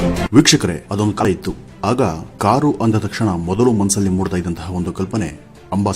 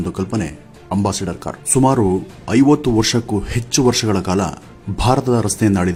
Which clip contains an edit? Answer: first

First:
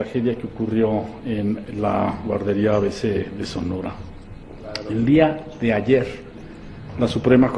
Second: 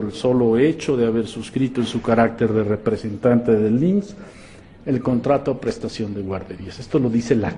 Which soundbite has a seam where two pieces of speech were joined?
second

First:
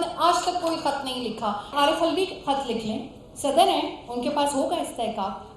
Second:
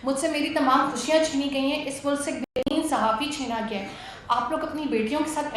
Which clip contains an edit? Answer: first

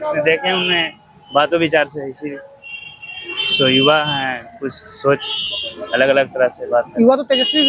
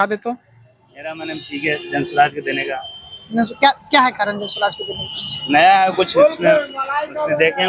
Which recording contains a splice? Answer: second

